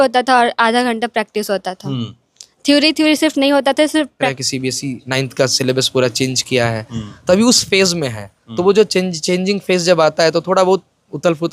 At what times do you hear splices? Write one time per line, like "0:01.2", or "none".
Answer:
0:04.4